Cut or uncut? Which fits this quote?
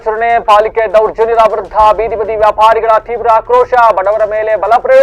uncut